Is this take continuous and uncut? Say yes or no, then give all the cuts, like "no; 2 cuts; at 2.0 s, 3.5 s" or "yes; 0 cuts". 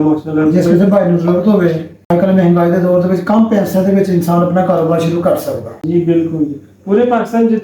no; 2 cuts; at 1.9 s, 5.7 s